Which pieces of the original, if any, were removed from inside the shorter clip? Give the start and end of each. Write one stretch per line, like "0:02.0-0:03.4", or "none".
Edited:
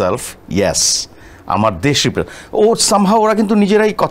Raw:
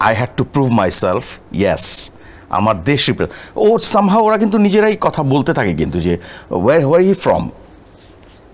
none